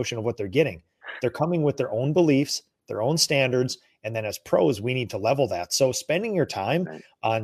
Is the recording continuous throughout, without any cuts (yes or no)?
yes